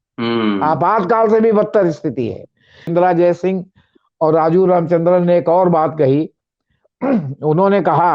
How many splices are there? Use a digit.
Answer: 1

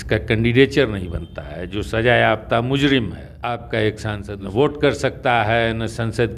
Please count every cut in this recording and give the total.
2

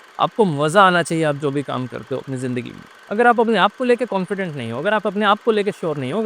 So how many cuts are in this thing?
1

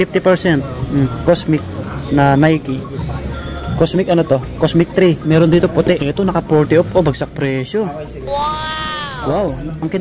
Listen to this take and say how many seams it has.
1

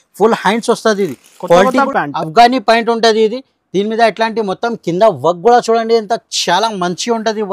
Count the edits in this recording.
1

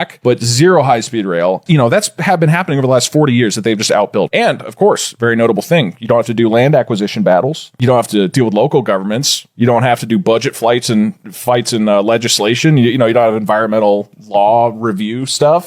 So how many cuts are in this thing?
2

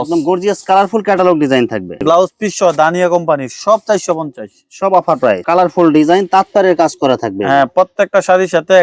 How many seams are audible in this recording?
2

